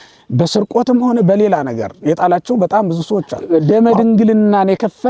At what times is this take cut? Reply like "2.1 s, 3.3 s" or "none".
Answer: 3.3 s